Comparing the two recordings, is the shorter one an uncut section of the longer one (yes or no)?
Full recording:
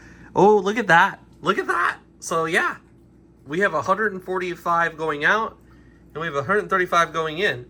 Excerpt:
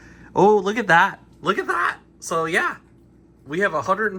yes